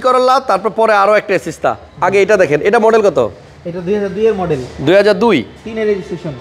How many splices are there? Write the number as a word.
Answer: zero